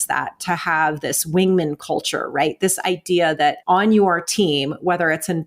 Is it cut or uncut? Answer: cut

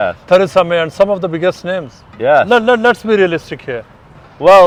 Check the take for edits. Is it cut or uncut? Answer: uncut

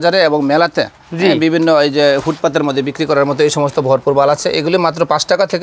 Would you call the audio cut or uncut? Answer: uncut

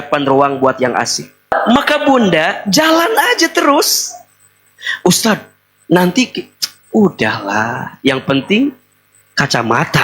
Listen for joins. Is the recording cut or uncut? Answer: cut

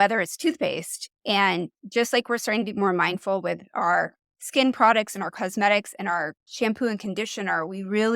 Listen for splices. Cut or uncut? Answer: cut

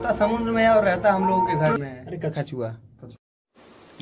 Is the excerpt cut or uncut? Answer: cut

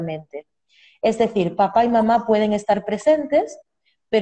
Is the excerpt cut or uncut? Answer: uncut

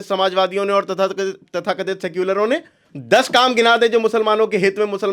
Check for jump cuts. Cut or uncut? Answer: cut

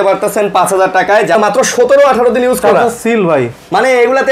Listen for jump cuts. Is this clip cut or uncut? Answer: cut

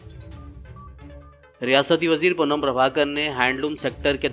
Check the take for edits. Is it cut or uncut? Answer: uncut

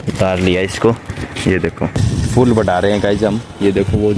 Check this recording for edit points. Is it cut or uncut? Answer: cut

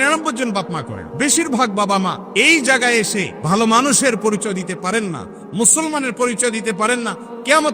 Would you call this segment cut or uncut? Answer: cut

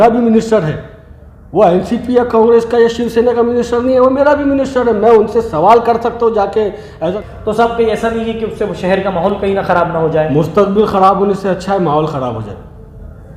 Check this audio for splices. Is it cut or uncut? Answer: cut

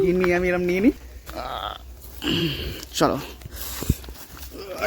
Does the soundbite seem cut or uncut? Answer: cut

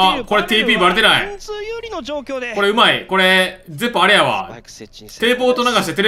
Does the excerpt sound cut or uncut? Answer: uncut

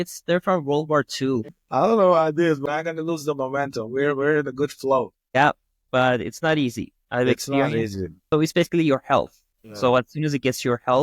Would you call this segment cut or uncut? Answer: cut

